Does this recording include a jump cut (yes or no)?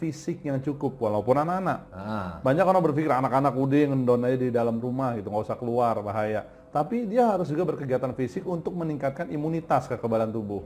no